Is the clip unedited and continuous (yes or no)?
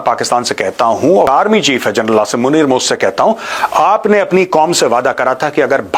no